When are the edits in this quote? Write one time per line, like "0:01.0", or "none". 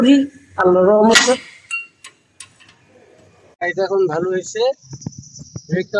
0:03.6